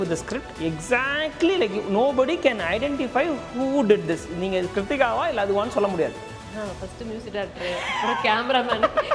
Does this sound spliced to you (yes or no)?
no